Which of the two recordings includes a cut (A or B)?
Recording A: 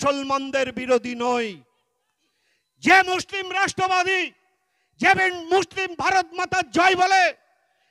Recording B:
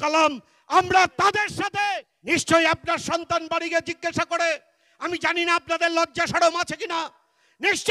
B